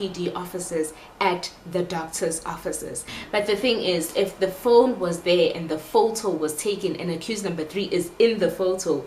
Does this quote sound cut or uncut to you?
cut